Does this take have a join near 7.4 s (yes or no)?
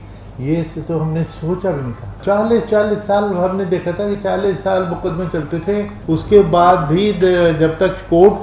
no